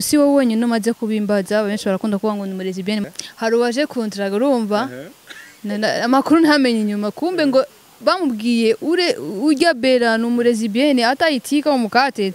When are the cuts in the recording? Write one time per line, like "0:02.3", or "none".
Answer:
0:03.0

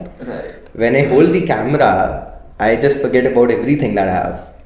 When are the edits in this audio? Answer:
none

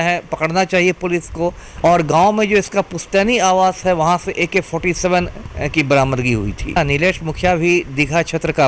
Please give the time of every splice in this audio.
0:01.6
0:06.8

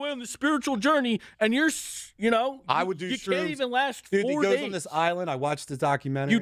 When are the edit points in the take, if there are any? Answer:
none

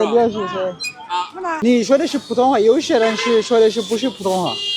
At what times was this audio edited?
0:01.6

